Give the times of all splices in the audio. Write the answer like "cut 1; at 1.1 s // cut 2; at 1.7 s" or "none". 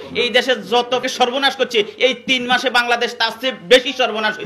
cut 1; at 1.0 s